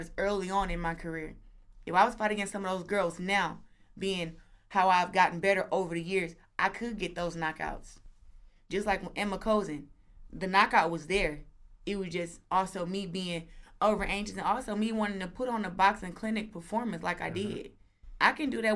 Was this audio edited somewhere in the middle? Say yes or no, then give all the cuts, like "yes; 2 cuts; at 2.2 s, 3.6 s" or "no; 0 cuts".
no; 0 cuts